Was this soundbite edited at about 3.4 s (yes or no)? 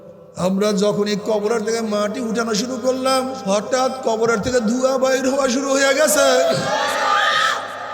yes